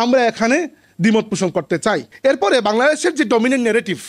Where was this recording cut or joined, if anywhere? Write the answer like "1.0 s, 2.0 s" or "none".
2.1 s